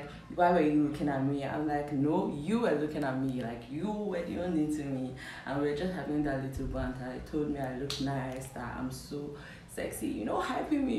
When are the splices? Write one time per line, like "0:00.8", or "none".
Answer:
none